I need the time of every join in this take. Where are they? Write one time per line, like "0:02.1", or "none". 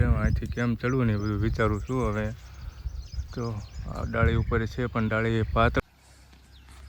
0:05.8